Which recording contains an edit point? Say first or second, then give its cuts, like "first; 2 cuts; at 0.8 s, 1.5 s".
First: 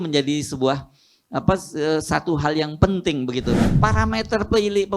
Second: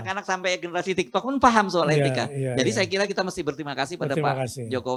first; 1 cut; at 3.7 s